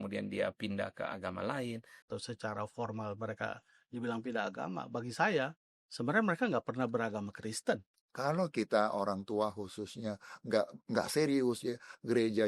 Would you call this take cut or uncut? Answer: cut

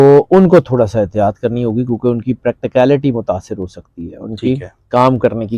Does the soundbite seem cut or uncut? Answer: uncut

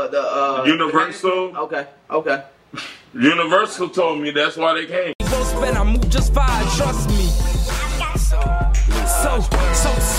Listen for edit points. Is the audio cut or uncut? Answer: cut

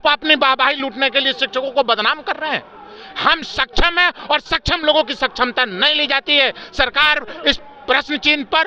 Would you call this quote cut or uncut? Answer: uncut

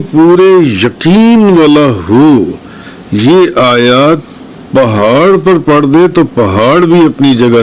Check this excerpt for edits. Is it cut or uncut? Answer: uncut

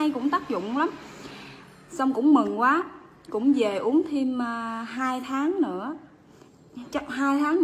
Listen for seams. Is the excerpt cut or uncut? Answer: uncut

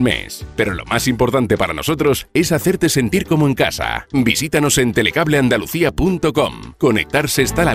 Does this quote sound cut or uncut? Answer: cut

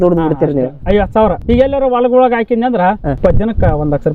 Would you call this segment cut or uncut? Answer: cut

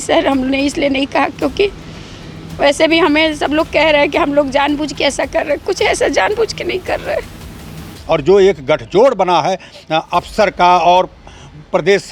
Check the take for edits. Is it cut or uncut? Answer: cut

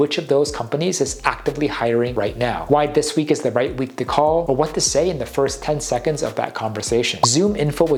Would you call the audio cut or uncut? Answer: uncut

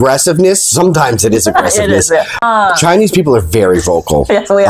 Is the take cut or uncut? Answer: cut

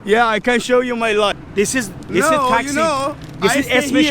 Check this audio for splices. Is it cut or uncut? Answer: cut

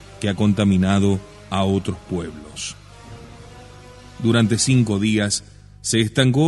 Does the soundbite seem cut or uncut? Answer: uncut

